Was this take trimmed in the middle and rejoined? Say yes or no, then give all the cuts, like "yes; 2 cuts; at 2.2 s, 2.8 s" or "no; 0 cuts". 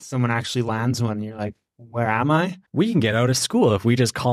yes; 1 cut; at 2.6 s